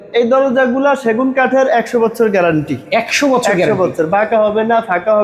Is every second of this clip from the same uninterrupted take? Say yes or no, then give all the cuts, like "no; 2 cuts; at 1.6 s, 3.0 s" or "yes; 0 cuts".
yes; 0 cuts